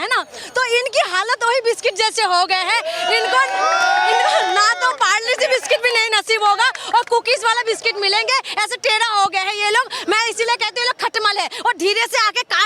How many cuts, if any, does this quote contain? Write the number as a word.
zero